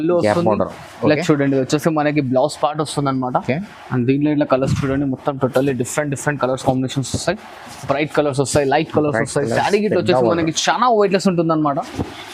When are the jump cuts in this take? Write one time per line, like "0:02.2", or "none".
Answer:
none